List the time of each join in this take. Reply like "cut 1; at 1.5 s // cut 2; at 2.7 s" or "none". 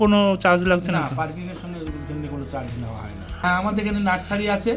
cut 1; at 3.4 s